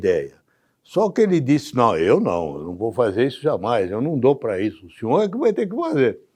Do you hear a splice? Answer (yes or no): no